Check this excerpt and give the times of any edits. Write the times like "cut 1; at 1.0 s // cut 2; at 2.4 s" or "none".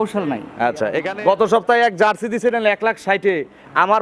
cut 1; at 1.0 s